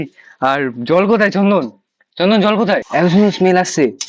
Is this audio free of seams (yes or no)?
no